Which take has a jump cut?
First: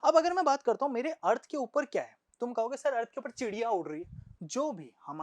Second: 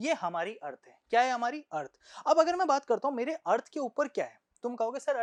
first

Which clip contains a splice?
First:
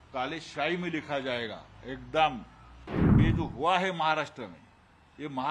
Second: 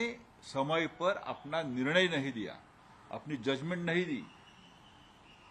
first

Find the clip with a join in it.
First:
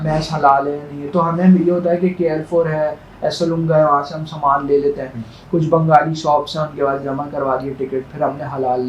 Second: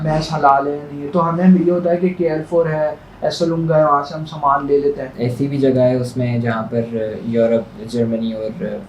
second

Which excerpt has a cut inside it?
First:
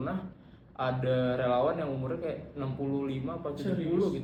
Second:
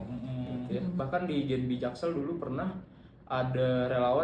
second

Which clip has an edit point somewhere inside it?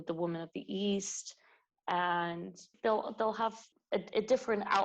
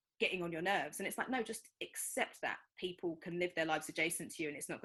first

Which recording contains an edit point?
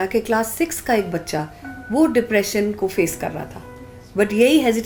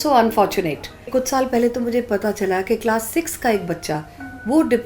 second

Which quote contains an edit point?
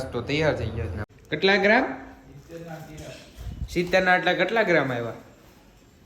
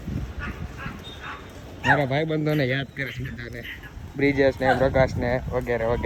first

